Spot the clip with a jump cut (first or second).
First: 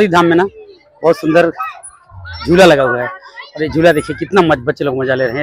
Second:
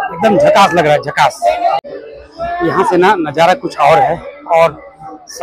second